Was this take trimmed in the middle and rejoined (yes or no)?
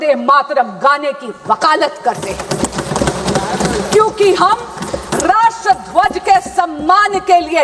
no